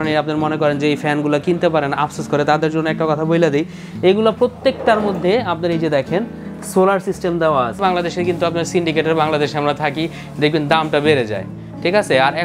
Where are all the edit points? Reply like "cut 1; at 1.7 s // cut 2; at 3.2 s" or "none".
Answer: cut 1; at 7.8 s